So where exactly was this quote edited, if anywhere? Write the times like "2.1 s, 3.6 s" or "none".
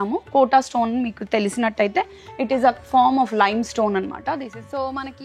4.2 s

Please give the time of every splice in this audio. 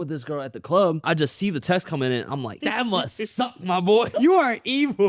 1.0 s, 2.6 s, 4.1 s

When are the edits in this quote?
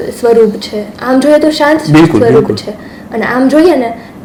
none

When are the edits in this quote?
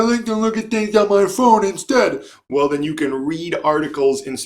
none

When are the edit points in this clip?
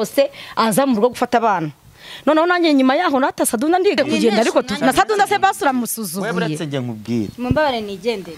4.0 s

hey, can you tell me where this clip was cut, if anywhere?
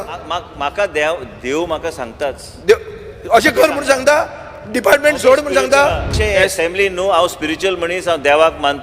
6.2 s

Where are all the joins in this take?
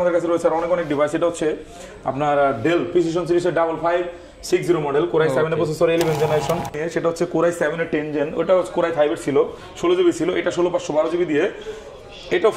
6.8 s

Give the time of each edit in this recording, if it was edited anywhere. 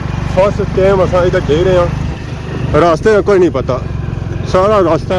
none

